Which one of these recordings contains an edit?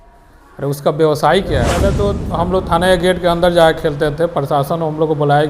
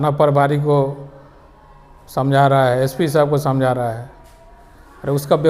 first; 1 cut; at 2.0 s

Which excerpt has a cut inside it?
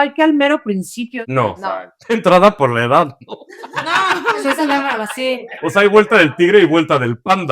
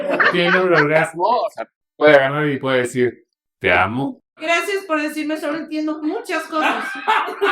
second; 1 cut; at 4.2 s

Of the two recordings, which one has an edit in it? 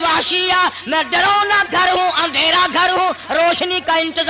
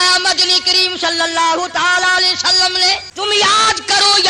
second; 1 cut; at 3.1 s

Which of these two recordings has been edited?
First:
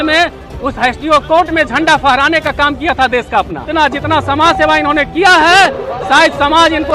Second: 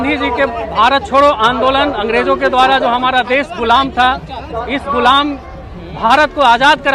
first; 1 cut; at 3.6 s

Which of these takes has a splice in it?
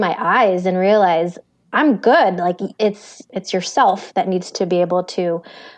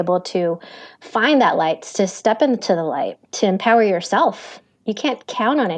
first; 1 cut; at 3.3 s

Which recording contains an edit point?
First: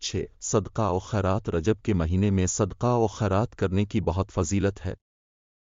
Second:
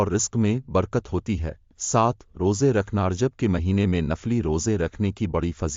second; 1 cut; at 2.1 s

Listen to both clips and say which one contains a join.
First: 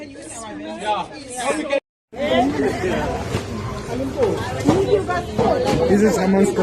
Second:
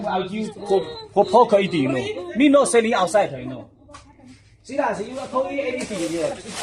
first; 1 cut; at 2.0 s

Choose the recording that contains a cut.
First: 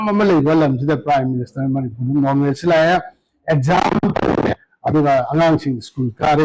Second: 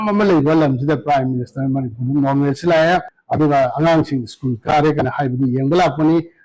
second; 1 cut; at 3.2 s

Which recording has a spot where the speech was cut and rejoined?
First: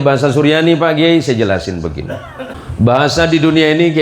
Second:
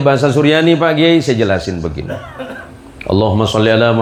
first; 1 cut; at 2.6 s

